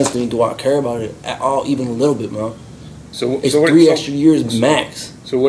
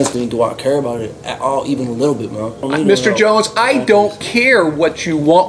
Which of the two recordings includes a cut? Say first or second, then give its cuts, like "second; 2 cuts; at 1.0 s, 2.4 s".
second; 1 cut; at 2.6 s